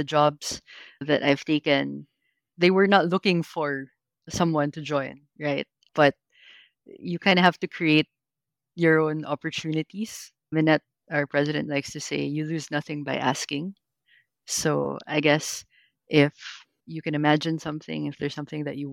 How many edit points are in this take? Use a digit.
1